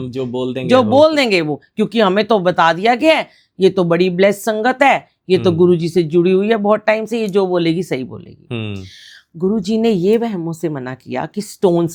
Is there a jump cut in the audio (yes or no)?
no